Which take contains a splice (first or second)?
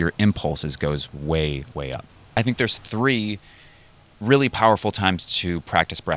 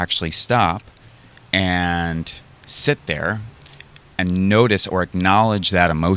first